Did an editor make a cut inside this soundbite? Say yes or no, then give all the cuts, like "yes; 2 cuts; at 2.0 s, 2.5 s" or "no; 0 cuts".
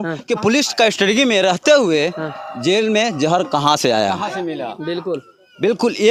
no; 0 cuts